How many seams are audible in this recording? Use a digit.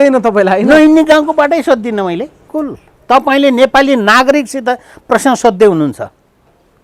1